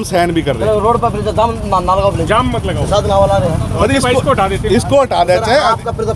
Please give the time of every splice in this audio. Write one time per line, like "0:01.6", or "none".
none